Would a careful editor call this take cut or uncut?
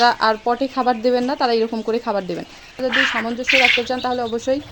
cut